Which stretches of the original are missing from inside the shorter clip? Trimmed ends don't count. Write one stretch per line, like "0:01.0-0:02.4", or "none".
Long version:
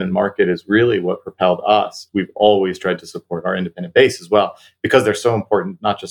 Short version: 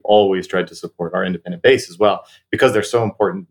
none